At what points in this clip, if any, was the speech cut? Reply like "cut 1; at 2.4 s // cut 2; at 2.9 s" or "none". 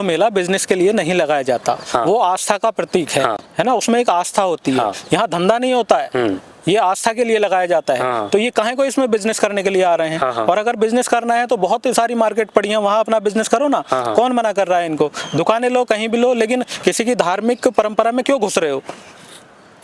none

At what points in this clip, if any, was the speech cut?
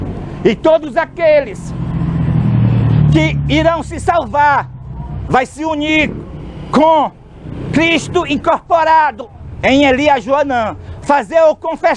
none

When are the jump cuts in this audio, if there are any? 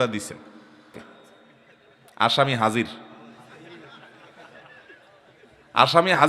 cut 1; at 0.9 s

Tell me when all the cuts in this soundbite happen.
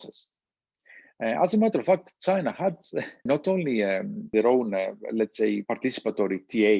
cut 1; at 3.2 s // cut 2; at 4.3 s // cut 3; at 5.6 s

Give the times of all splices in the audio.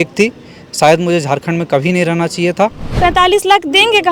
cut 1; at 2.9 s

